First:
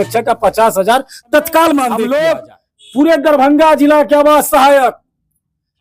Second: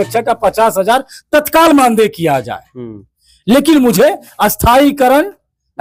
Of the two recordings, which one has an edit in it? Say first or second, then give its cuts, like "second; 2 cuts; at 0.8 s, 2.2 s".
first; 1 cut; at 2.0 s